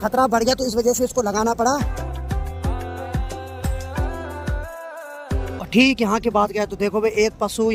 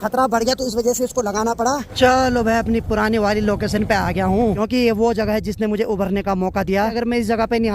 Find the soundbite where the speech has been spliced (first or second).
second